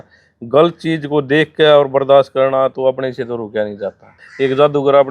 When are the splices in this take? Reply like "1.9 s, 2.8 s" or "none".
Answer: 4.2 s